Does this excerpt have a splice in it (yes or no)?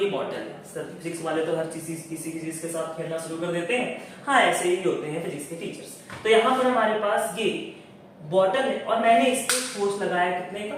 no